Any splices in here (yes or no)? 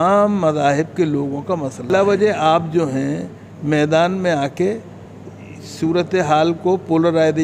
yes